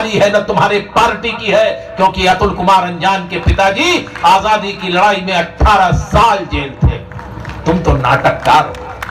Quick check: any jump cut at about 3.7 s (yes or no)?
no